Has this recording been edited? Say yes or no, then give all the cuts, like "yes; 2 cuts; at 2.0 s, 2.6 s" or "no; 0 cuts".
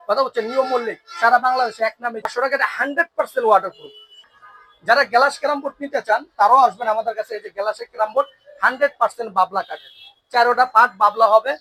no; 0 cuts